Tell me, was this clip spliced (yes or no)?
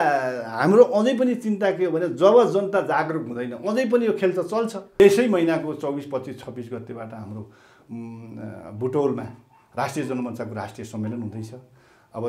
yes